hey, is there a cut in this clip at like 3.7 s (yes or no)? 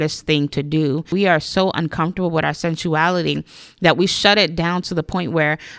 no